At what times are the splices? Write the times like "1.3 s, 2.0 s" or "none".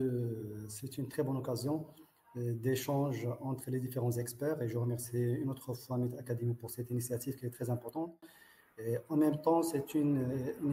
none

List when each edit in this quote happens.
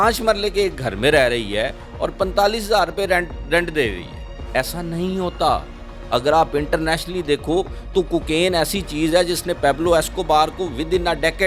none

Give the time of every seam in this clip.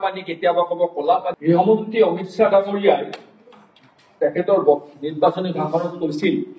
1.4 s

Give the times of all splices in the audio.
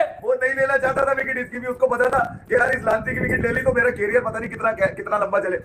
none

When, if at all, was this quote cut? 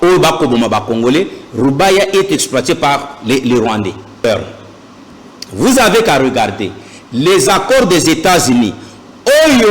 4.2 s

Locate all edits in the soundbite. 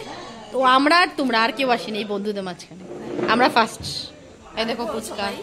none

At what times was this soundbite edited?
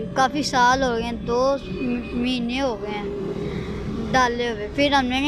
none

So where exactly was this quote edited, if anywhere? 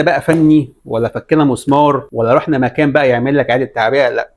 2.1 s

